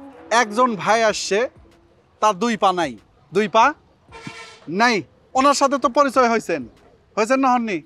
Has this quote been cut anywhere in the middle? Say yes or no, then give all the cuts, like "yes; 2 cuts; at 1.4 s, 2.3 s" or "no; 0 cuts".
no; 0 cuts